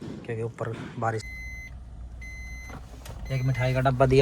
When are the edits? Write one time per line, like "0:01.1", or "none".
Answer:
0:01.2